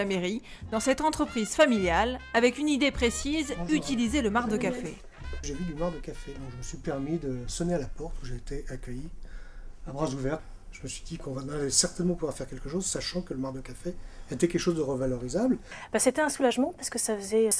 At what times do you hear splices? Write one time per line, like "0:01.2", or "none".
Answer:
none